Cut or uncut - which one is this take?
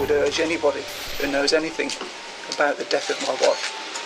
cut